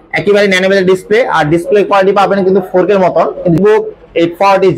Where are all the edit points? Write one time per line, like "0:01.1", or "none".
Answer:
0:03.6